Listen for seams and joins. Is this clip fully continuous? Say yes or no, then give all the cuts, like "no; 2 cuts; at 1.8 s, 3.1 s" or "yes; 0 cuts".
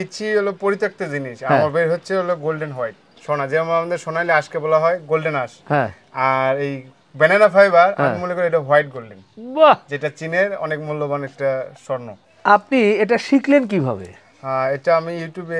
yes; 0 cuts